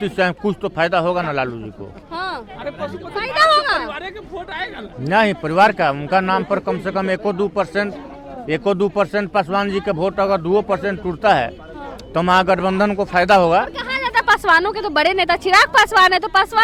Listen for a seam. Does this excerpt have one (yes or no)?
no